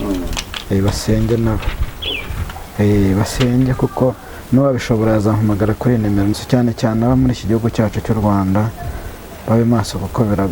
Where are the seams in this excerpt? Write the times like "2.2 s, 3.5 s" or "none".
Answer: 6.3 s